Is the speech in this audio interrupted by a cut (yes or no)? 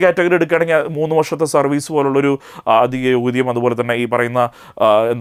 no